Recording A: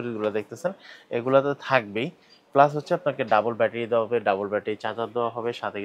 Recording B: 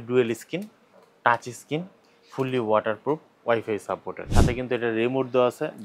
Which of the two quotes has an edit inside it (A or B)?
B